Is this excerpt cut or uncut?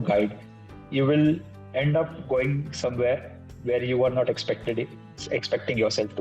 cut